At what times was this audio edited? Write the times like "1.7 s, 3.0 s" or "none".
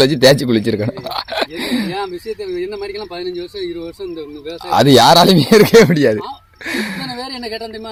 none